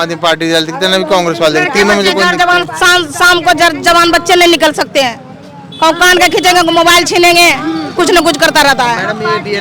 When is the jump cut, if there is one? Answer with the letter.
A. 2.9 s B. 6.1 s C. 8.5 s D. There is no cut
D